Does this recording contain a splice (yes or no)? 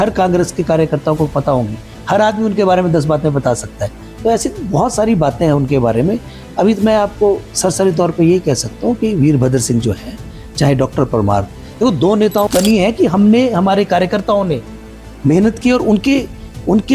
yes